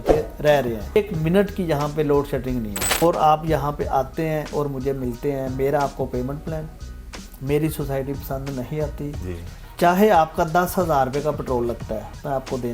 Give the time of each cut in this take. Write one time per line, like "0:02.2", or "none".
0:01.0
0:03.0